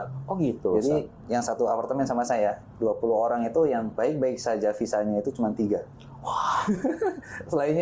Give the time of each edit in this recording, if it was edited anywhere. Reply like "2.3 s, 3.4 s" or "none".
1.2 s, 4.0 s